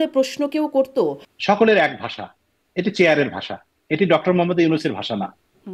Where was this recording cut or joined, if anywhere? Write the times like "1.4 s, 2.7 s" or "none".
1.3 s